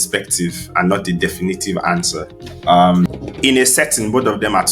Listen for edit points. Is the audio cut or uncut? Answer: cut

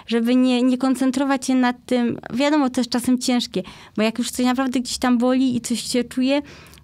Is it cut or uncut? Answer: uncut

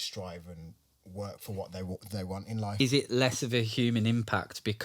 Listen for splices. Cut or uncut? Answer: cut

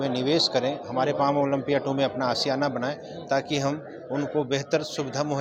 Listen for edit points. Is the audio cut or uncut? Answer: uncut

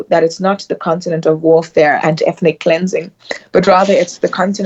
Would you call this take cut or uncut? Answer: uncut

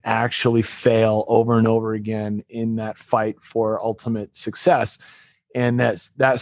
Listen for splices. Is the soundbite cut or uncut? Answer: uncut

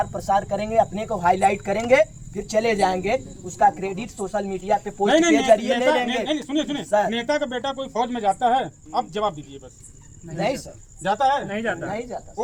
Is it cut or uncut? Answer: uncut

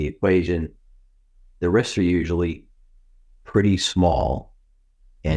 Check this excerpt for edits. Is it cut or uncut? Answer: uncut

